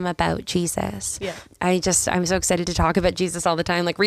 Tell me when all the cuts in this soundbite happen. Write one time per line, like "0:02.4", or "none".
0:01.4